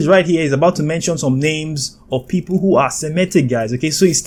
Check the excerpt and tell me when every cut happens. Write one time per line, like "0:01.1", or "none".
none